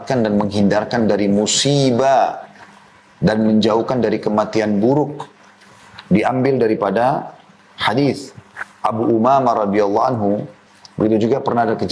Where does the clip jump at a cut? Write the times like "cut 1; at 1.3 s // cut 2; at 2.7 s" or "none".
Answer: cut 1; at 10.6 s